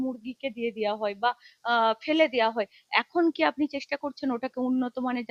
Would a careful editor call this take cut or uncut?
uncut